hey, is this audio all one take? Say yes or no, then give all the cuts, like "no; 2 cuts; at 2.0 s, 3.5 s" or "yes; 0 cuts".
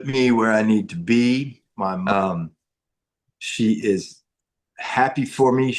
no; 1 cut; at 2.1 s